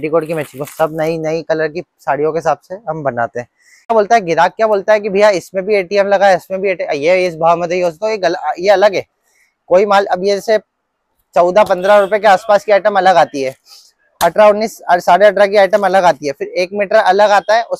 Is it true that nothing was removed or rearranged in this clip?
no; 1 cut; at 3.8 s

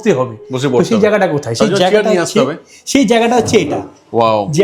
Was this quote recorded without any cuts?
yes; 0 cuts

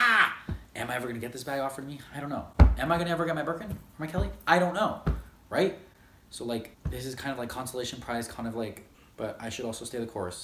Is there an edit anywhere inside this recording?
no; 0 cuts

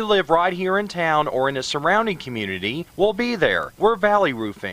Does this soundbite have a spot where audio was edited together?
yes; 1 cut; at 3.7 s

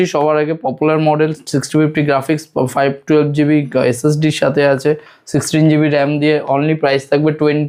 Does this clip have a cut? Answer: no; 0 cuts

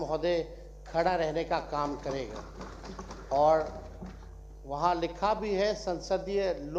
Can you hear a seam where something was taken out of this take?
no; 0 cuts

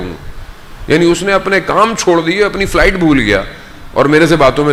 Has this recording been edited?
no; 0 cuts

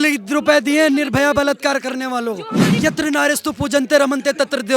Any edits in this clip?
yes; 1 cut; at 2.8 s

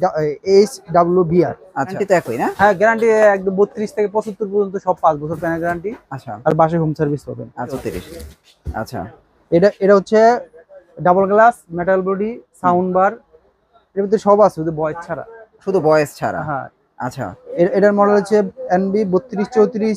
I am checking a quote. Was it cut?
yes; 2 cuts; at 2.0 s, 7.8 s

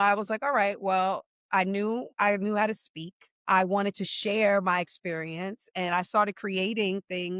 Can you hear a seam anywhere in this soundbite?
yes; 2 cuts; at 2.1 s, 3.4 s

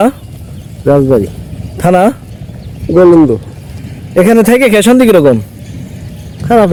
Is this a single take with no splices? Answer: yes; 0 cuts

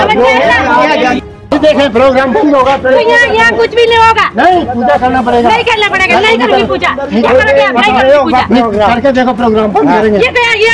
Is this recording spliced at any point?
yes; 1 cut; at 1.5 s

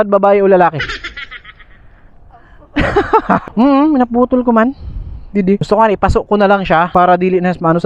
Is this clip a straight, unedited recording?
no; 1 cut; at 3.4 s

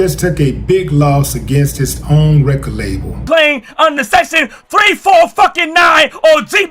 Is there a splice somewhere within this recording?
yes; 1 cut; at 3.2 s

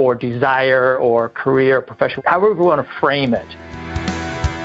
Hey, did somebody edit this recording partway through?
yes; 2 cuts; at 2.2 s, 3.7 s

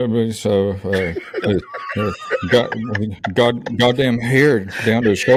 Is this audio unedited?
yes; 0 cuts

